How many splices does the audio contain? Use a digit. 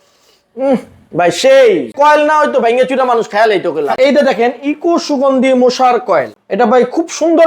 2